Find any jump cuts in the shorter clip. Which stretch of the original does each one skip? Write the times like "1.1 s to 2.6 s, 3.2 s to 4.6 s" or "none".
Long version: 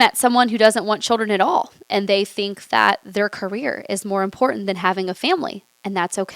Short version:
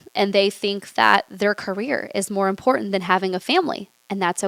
none